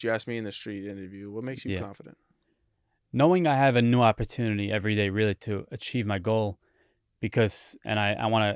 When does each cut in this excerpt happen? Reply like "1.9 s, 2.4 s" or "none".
none